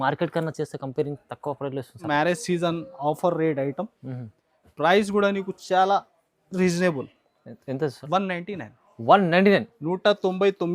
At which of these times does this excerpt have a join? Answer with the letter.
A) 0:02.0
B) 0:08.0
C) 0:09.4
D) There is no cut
A